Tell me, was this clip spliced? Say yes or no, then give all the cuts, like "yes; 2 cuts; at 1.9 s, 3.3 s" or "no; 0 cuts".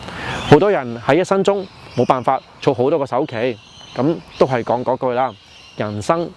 no; 0 cuts